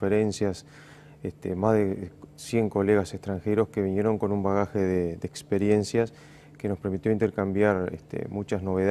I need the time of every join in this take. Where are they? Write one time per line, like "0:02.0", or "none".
0:03.9